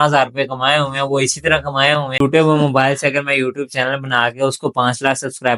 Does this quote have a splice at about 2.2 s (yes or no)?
yes